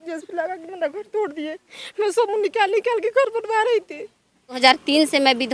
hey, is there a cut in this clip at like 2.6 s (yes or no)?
no